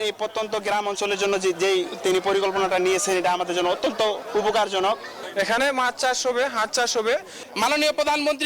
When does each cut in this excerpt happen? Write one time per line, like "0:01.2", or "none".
0:07.4